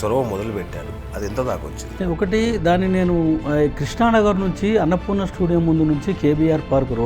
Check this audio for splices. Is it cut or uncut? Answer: cut